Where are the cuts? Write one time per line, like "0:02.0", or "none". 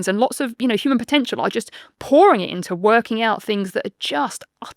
none